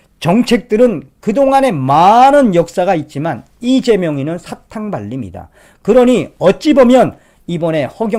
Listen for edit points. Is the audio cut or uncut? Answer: uncut